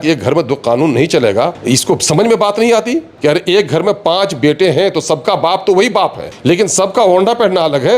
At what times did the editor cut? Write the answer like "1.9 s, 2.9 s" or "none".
1.6 s, 3.1 s, 6.3 s